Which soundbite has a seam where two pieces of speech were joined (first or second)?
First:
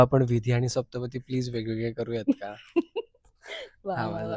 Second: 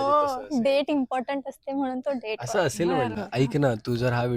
second